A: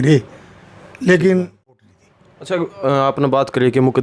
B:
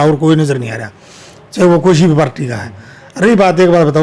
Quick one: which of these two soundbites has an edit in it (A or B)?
A